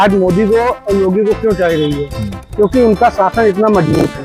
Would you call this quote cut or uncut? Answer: uncut